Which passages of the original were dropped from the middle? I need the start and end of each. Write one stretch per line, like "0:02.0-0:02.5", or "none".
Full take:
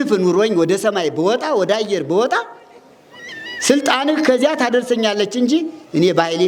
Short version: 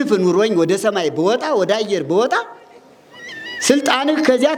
none